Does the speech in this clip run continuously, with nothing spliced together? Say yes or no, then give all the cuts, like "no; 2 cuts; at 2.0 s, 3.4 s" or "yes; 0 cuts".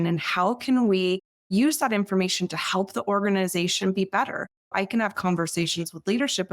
no; 1 cut; at 4.7 s